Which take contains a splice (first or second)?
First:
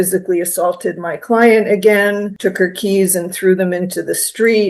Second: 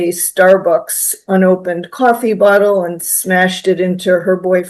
first